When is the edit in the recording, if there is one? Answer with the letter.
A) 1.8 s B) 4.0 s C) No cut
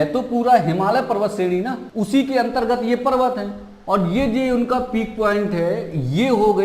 A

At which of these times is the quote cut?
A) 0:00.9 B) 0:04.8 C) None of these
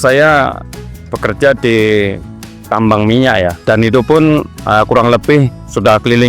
B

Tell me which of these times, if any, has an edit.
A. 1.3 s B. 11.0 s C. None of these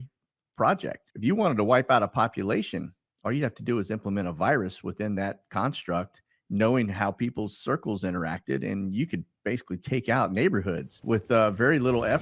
B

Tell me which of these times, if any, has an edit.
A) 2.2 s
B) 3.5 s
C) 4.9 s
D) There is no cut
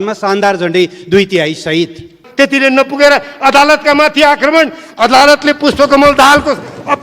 A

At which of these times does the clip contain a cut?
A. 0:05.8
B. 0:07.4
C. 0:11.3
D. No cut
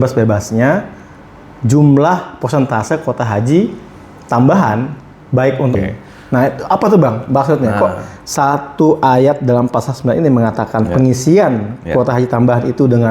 A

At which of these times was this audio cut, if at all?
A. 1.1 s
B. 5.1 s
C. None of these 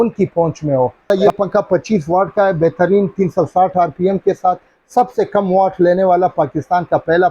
A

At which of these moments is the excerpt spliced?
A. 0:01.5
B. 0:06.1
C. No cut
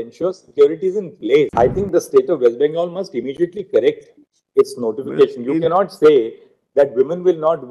A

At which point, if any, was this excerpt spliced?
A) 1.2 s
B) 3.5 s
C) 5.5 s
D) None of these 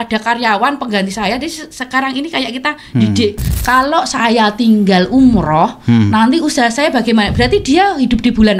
B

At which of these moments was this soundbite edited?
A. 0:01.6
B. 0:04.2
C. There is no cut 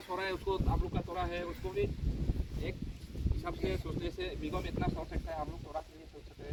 C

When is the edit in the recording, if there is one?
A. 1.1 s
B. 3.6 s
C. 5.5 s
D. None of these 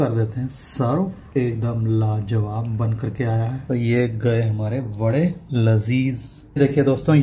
B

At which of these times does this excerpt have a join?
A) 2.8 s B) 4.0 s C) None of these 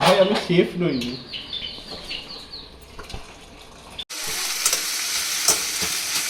B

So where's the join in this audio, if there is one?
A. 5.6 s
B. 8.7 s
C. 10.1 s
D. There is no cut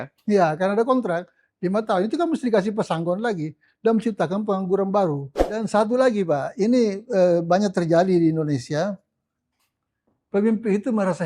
A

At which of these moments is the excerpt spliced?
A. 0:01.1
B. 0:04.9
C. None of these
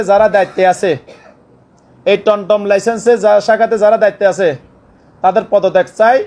C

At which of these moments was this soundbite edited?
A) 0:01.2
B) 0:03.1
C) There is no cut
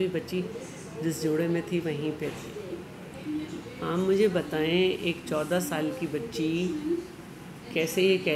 B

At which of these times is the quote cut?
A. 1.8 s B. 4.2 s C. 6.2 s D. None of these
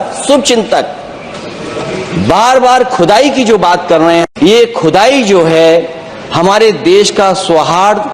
B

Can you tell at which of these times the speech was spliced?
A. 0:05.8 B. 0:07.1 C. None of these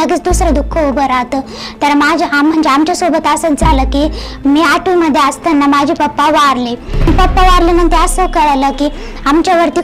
B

